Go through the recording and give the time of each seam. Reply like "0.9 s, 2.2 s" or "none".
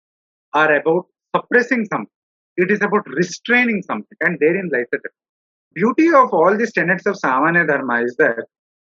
5.7 s